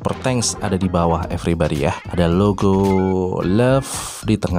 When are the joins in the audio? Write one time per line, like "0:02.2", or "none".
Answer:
0:02.0